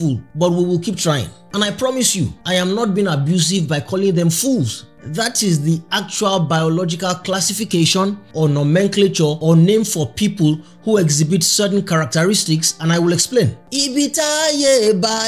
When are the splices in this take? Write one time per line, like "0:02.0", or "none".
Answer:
0:01.3
0:13.6